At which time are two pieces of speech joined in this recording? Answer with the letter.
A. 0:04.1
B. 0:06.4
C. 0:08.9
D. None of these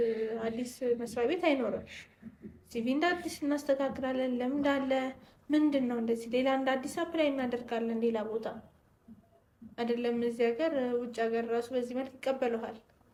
D